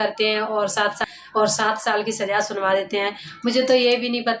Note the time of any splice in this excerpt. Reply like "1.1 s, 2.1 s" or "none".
1.0 s